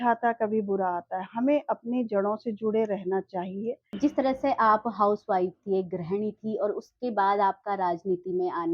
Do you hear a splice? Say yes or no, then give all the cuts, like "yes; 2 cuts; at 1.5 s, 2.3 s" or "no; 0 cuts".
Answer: yes; 1 cut; at 3.9 s